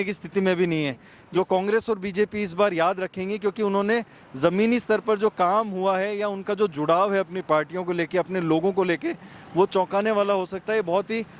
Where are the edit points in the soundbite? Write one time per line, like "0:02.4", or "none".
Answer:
0:01.1